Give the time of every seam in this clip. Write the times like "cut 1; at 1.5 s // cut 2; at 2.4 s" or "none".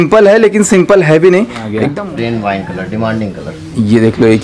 cut 1; at 1.8 s